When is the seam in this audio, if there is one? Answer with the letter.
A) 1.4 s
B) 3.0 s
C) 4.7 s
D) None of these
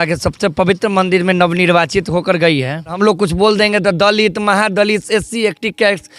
B